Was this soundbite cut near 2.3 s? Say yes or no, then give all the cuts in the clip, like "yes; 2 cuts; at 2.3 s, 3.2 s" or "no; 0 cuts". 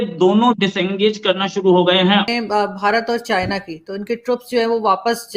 yes; 1 cut; at 2.3 s